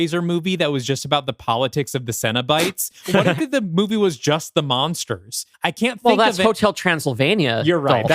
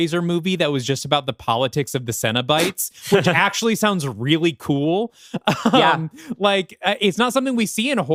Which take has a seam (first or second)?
first